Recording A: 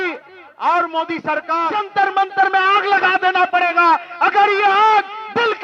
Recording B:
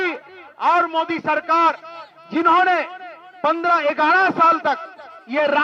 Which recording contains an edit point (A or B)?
A